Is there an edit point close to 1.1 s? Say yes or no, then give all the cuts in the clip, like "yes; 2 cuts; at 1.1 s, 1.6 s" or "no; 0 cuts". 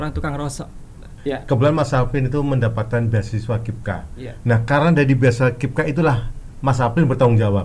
yes; 1 cut; at 1.1 s